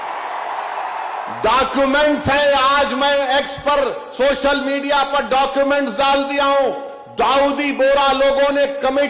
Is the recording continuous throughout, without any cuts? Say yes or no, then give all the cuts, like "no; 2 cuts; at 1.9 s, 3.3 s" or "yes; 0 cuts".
yes; 0 cuts